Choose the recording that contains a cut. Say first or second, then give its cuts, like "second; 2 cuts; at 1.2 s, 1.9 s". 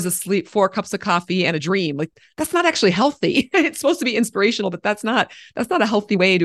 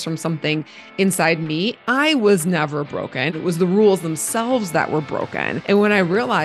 second; 3 cuts; at 1.8 s, 3.3 s, 5.5 s